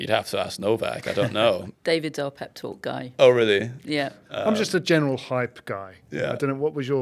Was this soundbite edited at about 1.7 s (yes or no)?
yes